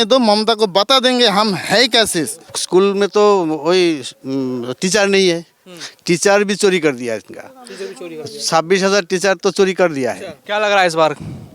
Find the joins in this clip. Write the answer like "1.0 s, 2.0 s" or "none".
2.6 s, 10.4 s